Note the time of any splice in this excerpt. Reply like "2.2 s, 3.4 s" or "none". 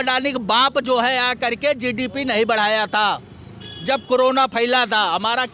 none